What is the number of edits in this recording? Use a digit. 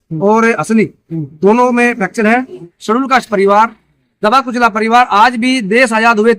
1